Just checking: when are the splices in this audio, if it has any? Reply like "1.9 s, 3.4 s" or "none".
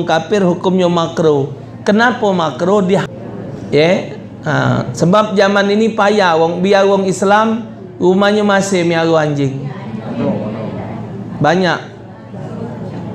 3.0 s